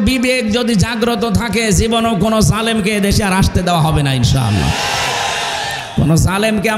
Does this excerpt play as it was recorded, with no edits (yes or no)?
yes